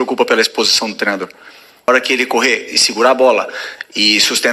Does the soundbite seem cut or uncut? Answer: cut